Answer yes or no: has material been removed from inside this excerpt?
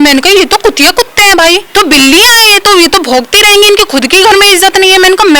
yes